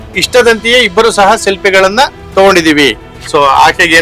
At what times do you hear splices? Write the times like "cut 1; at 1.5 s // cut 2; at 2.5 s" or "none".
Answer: cut 1; at 3.1 s